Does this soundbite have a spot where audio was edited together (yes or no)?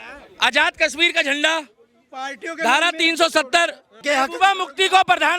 yes